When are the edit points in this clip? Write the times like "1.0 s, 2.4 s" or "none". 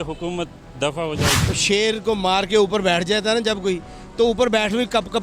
1.4 s